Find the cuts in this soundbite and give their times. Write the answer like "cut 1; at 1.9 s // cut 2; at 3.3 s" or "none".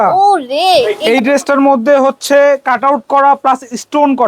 cut 1; at 0.9 s